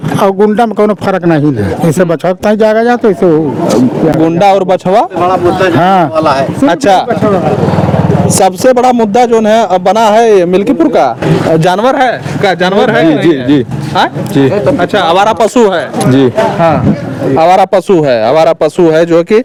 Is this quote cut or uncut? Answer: uncut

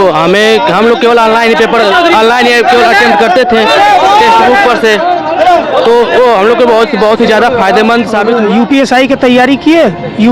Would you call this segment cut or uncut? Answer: cut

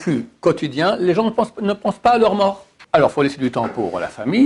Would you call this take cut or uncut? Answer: cut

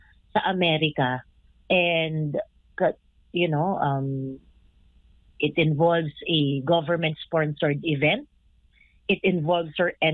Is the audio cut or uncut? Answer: uncut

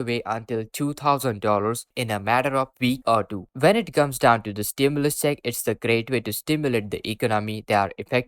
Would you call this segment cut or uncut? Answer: cut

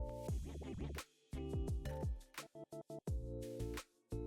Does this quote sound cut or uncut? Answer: cut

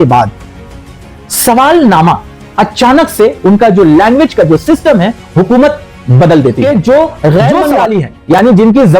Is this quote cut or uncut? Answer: cut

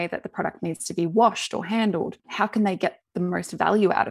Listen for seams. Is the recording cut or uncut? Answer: uncut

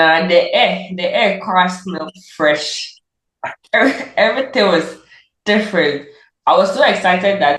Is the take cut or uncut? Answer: uncut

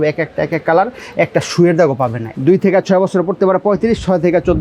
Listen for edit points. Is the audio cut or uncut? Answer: cut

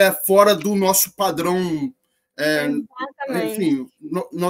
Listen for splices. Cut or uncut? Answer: uncut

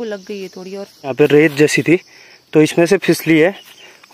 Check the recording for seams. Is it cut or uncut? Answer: cut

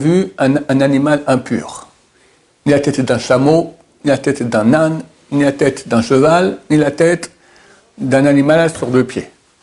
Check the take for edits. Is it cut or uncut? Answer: uncut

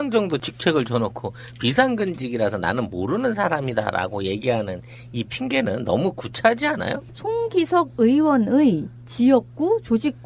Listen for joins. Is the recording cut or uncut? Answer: uncut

